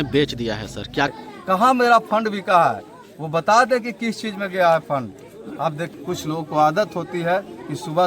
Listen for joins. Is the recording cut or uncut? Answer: cut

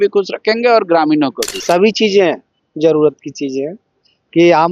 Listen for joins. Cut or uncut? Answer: cut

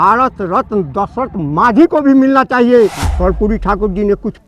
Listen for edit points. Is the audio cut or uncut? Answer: cut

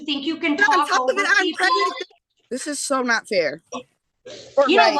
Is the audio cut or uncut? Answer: cut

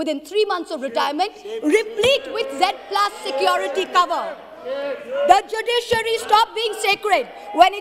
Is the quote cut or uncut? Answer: uncut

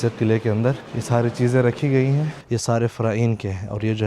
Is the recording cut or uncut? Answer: cut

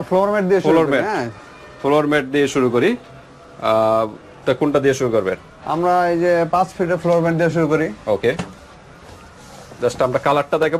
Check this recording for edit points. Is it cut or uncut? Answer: uncut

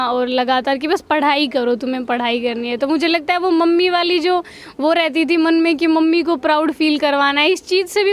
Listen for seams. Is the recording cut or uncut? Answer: uncut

